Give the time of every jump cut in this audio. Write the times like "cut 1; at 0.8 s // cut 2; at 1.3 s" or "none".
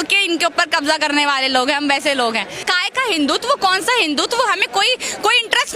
cut 1; at 2.7 s